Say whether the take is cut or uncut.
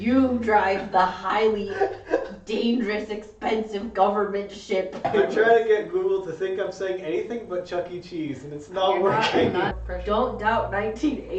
cut